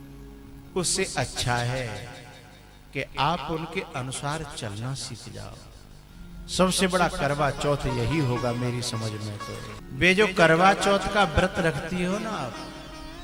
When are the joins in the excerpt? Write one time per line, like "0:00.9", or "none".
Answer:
0:09.8